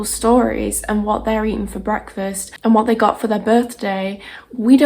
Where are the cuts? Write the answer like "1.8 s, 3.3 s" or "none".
2.5 s